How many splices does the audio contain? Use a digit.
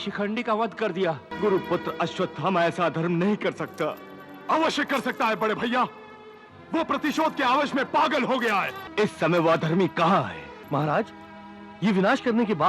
3